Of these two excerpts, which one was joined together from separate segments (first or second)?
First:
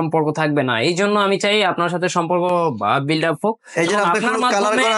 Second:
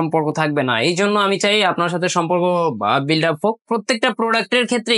second